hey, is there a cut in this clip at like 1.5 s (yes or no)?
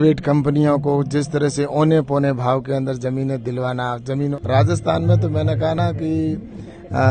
no